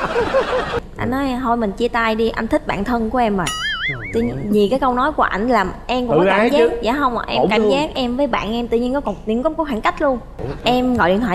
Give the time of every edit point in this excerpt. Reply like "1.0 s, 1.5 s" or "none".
0.8 s, 10.4 s